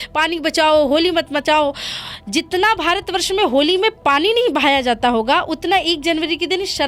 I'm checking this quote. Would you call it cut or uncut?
uncut